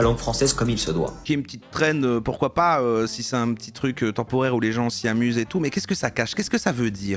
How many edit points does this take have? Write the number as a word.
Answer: one